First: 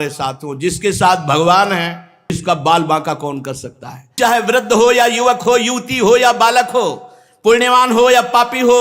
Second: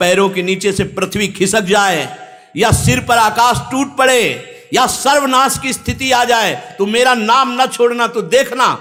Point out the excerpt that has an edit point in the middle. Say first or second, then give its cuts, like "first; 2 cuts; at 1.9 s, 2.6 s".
first; 2 cuts; at 2.4 s, 4.2 s